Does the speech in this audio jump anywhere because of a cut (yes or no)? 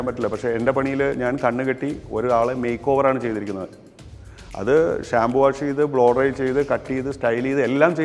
no